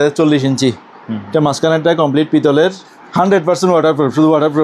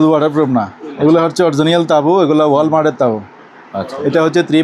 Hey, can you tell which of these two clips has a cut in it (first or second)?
first